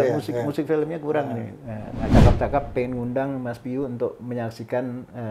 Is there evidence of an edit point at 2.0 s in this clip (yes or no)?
yes